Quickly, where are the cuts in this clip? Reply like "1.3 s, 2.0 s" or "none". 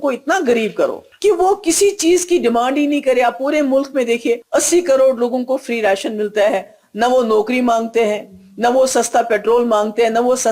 1.1 s, 4.4 s